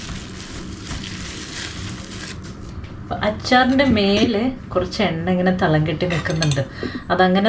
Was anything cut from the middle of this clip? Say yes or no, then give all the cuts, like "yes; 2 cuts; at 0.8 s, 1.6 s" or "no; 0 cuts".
yes; 1 cut; at 2.7 s